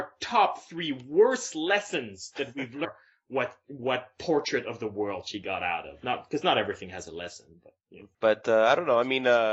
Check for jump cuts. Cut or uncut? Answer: uncut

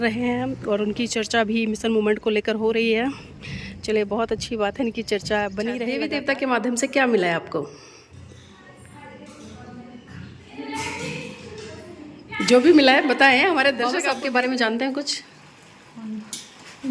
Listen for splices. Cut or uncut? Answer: cut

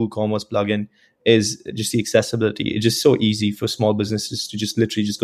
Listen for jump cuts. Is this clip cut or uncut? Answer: uncut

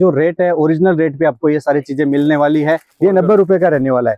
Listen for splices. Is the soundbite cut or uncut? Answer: cut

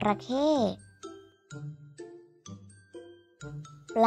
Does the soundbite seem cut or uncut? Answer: uncut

